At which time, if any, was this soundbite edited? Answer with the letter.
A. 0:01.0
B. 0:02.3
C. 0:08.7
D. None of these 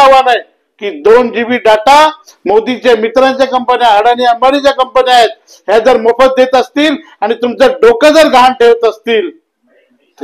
B